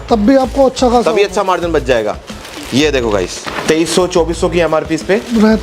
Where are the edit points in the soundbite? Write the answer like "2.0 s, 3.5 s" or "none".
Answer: 3.5 s